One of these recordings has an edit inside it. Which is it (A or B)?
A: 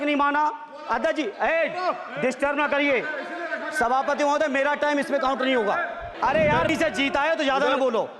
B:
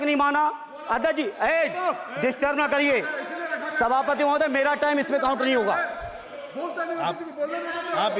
A